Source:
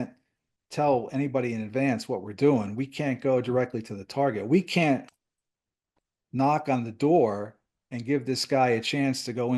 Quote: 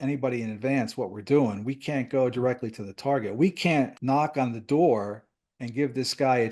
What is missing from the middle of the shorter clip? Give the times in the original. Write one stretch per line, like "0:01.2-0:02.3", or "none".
0:05.1-0:06.3